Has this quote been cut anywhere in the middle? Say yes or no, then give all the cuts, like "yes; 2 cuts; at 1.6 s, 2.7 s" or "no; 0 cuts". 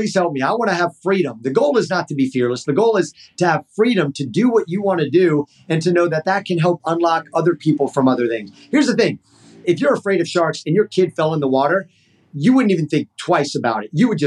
yes; 2 cuts; at 9.6 s, 12.3 s